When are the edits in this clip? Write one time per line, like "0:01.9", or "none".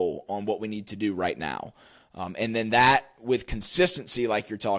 none